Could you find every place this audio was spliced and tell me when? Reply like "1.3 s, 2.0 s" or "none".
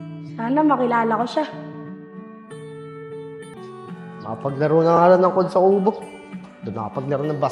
3.5 s